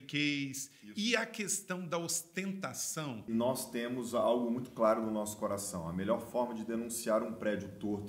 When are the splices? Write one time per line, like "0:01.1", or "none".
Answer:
0:03.3